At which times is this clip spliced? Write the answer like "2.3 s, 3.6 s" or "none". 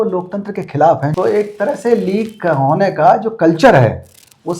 1.1 s